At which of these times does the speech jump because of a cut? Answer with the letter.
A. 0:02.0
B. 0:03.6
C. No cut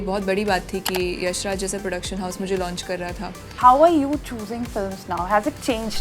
B